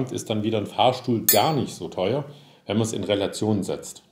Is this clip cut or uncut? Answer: uncut